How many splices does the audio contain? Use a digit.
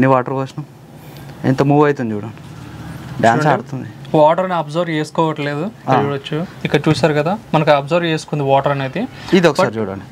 1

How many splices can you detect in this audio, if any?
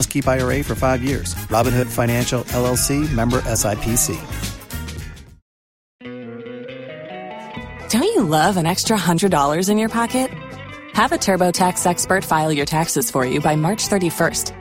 1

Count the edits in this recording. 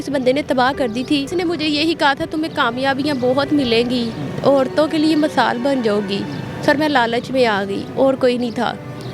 1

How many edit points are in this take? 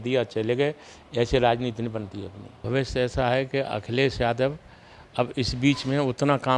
1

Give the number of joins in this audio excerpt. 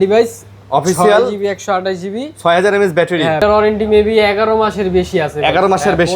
1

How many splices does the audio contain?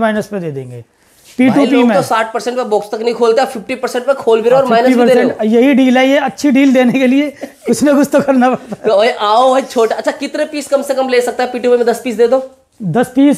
0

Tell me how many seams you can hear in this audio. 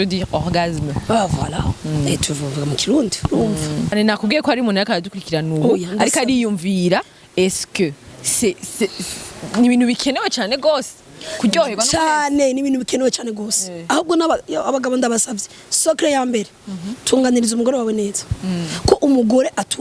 1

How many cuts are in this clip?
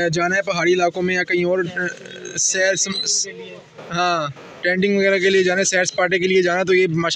0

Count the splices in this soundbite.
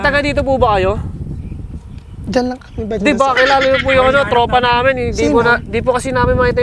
0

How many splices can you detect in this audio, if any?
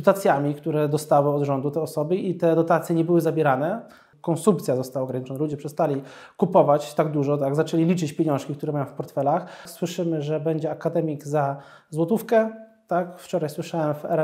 2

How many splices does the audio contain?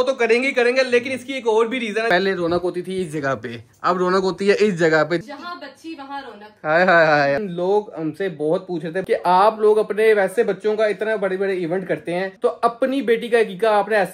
4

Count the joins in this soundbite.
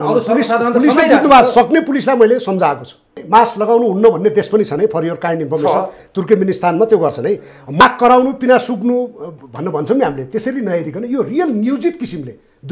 2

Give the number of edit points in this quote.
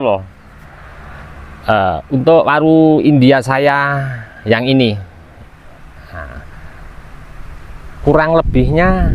1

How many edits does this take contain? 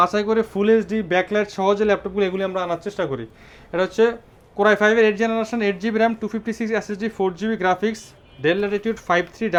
0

